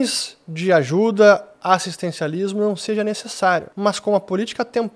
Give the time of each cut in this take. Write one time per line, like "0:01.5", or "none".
0:03.7